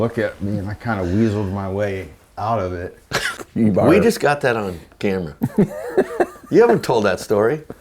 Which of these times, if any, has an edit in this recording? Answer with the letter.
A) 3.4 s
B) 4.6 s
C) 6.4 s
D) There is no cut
A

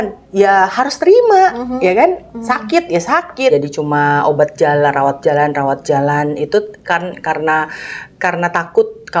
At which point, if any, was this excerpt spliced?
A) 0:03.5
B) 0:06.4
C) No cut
A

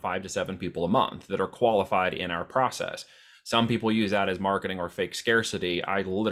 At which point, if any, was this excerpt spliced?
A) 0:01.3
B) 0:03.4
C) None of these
C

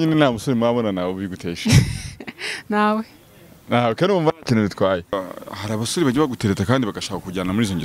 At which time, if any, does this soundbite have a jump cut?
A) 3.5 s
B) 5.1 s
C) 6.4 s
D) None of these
B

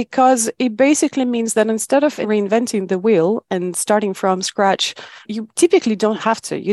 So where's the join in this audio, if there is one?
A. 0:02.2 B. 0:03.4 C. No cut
A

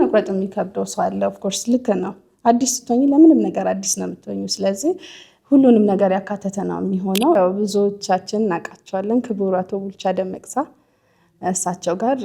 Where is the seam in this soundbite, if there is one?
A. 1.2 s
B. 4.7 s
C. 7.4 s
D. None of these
C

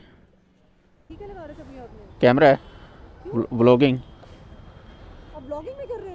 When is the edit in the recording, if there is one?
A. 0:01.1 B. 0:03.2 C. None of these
A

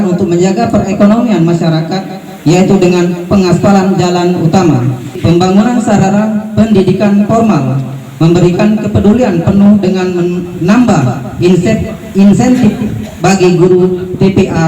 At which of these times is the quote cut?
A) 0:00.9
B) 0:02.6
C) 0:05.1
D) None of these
C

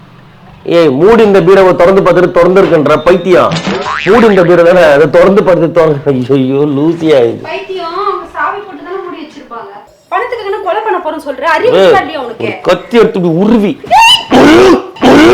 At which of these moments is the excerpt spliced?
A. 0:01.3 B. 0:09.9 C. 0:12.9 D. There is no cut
B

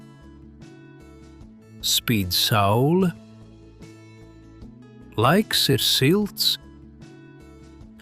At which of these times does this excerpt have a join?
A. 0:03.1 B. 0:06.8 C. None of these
B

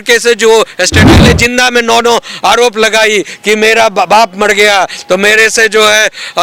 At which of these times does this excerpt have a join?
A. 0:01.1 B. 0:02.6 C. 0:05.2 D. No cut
A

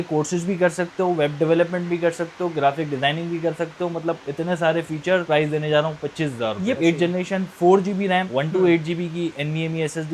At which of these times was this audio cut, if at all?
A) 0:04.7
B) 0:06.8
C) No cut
B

